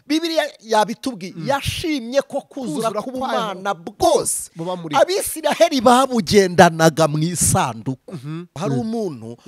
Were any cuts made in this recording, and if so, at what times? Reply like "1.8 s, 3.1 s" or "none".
8.5 s